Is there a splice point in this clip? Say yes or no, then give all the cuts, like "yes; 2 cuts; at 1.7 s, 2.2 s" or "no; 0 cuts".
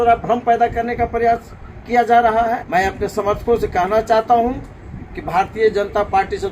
yes; 1 cut; at 2.6 s